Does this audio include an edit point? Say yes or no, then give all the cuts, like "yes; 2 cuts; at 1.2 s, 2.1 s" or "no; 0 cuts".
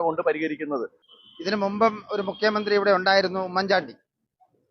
yes; 1 cut; at 1.0 s